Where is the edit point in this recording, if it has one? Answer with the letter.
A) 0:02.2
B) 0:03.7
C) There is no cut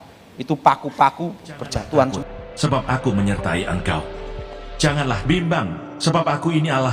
A